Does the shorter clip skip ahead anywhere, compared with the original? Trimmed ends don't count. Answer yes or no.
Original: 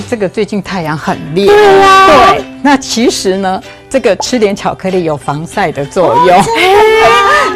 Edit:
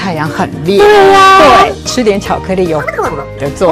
yes